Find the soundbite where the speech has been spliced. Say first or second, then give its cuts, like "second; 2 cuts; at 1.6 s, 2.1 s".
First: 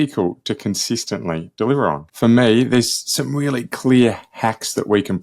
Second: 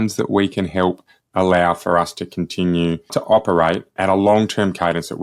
first; 1 cut; at 2.1 s